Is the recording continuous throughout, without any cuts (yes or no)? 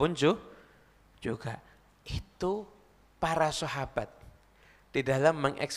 yes